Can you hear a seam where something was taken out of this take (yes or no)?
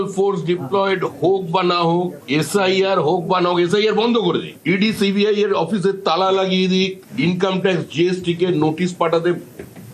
no